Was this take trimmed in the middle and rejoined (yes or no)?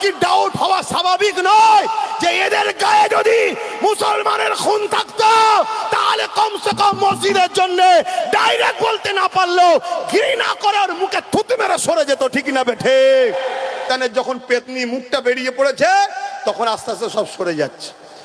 yes